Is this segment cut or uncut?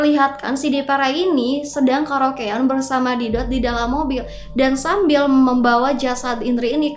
uncut